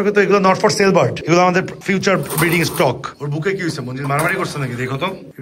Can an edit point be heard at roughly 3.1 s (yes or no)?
yes